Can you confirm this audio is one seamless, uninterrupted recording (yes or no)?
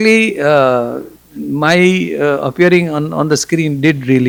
yes